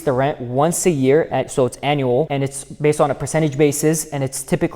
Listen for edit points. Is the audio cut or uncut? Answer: cut